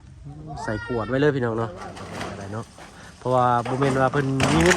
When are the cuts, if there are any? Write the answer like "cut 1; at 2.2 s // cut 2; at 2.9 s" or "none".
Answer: cut 1; at 2.0 s